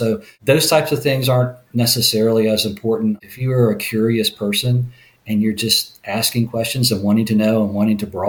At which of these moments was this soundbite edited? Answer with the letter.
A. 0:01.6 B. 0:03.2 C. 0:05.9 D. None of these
B